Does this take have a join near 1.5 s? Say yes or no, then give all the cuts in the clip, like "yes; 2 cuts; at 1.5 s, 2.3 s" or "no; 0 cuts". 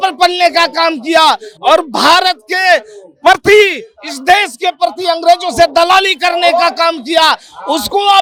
no; 0 cuts